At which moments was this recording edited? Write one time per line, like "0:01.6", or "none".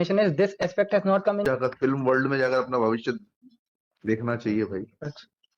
0:01.4